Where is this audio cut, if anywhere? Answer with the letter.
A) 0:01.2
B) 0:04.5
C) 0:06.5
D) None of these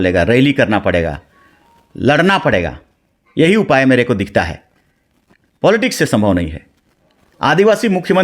D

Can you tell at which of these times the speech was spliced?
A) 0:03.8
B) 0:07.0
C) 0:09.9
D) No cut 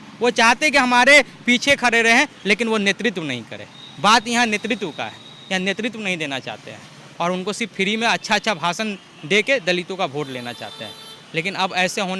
D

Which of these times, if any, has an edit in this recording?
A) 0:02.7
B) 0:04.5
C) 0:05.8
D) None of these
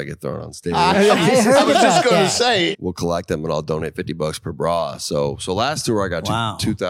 A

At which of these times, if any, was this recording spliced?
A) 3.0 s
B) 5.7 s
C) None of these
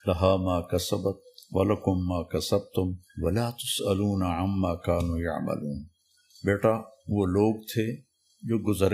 A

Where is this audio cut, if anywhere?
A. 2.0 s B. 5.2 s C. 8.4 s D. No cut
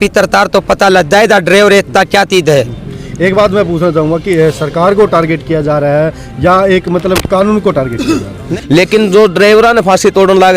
C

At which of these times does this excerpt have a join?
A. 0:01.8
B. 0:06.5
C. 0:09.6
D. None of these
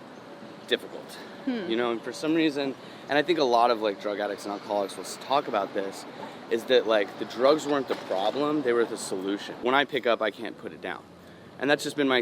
C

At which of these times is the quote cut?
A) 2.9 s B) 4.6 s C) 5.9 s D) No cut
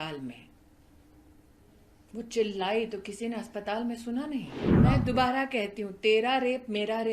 B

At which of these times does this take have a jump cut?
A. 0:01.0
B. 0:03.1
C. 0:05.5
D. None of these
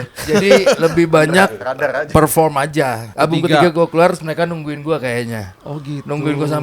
B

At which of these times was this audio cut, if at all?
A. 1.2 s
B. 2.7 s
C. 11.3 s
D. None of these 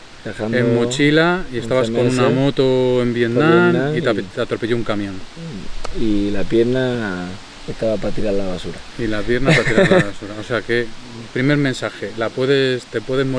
D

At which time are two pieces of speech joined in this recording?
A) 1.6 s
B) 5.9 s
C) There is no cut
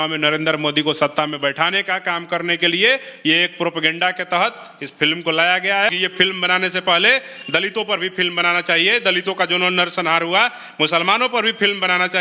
B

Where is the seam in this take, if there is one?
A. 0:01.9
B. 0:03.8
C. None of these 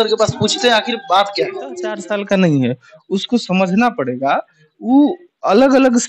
A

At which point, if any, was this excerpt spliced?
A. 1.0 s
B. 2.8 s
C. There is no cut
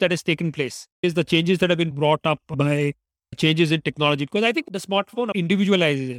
A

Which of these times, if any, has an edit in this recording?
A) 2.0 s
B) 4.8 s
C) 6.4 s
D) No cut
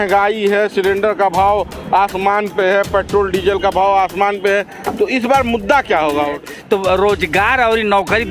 C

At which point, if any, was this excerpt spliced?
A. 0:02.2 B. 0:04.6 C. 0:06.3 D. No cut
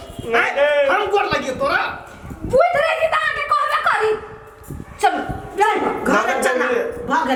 D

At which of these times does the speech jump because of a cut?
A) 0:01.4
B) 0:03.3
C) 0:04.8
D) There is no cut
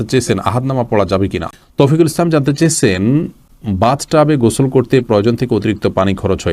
A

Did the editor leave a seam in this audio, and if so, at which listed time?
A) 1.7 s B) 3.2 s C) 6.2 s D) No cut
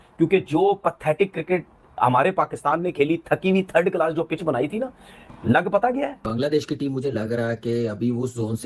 C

